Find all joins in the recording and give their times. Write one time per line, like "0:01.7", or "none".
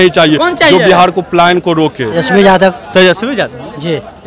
0:02.1